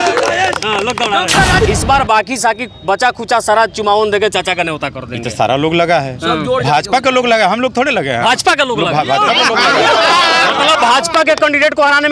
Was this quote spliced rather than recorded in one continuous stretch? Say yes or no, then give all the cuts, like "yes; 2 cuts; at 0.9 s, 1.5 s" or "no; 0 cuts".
yes; 1 cut; at 1.7 s